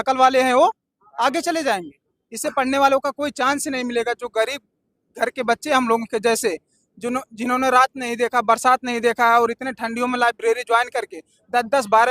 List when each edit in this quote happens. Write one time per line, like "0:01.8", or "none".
none